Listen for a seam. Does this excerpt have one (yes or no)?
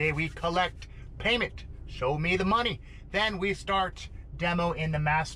no